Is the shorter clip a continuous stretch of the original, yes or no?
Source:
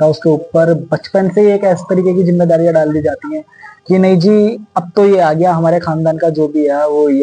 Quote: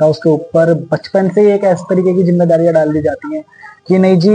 yes